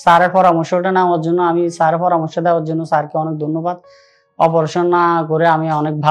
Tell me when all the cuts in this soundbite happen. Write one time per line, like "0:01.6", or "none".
none